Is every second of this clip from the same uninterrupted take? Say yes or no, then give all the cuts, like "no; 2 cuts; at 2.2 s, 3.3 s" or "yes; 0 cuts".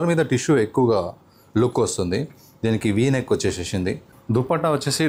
no; 1 cut; at 4.1 s